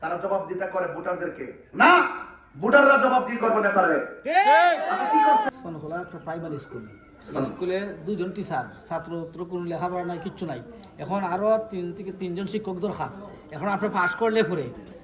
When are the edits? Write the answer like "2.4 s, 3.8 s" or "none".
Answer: 5.5 s